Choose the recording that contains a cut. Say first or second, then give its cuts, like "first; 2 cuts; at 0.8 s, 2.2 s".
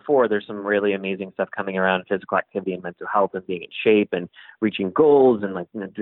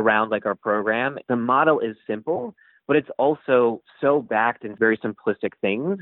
second; 2 cuts; at 1.2 s, 4.7 s